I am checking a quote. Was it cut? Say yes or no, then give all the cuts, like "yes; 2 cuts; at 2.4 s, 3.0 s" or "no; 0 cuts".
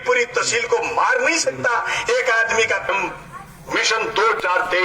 yes; 1 cut; at 2.9 s